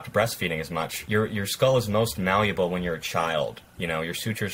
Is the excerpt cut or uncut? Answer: cut